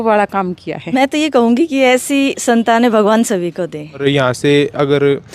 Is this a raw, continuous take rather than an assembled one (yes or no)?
no